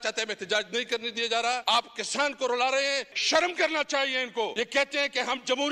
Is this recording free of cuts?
no; 3 cuts; at 1.6 s, 3.1 s, 4.5 s

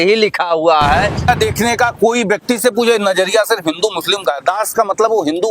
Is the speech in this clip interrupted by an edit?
yes; 1 cut; at 1.3 s

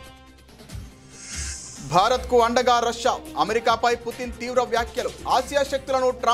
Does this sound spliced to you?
yes; 1 cut; at 1.7 s

